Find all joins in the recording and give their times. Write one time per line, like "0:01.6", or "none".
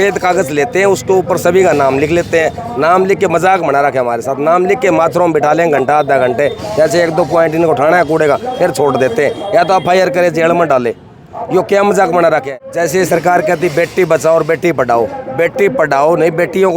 0:12.5